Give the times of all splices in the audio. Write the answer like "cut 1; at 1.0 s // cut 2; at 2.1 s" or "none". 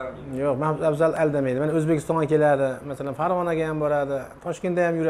none